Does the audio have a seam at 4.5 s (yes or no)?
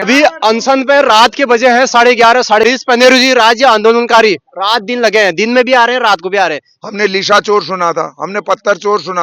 no